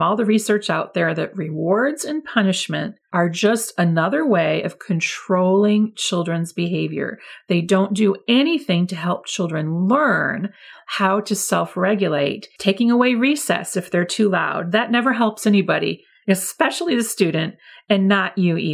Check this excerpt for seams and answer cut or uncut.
cut